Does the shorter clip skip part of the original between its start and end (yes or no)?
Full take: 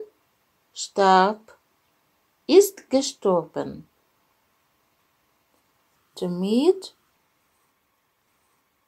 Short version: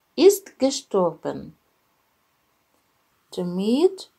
yes